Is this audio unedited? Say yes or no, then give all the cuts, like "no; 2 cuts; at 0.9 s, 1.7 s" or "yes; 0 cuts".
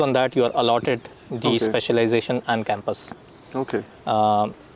yes; 0 cuts